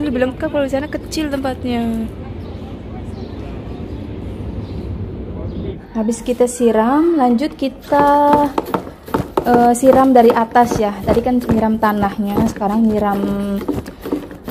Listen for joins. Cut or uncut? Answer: cut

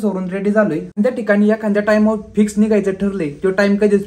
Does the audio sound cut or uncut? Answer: cut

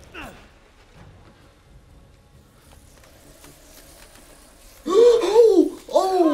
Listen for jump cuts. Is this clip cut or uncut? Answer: uncut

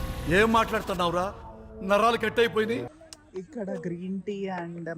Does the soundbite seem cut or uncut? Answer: cut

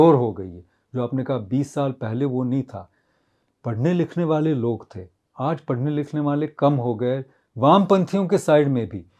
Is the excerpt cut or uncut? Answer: uncut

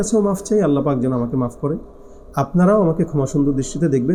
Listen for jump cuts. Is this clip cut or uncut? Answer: uncut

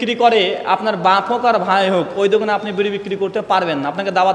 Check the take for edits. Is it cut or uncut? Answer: uncut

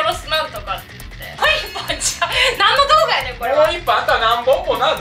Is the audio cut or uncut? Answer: cut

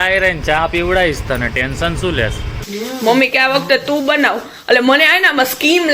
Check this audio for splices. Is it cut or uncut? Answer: cut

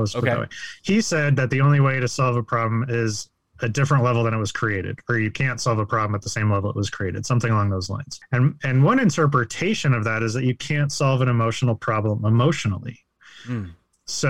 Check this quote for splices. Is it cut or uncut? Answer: uncut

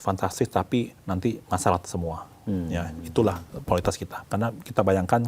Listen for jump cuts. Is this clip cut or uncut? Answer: cut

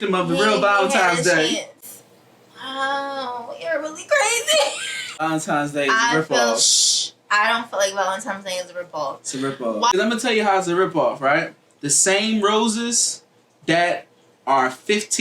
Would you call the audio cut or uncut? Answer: uncut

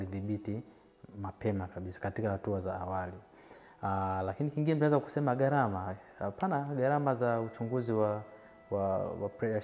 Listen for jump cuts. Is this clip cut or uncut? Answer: uncut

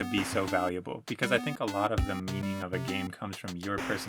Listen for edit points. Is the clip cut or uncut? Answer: uncut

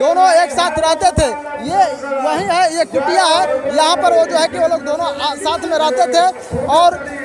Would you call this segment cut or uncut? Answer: uncut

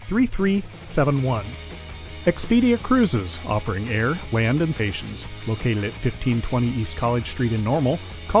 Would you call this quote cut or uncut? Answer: cut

